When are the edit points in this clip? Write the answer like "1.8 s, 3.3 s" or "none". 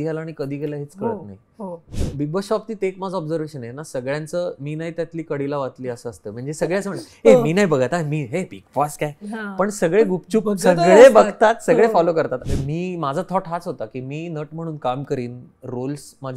1.7 s, 12.4 s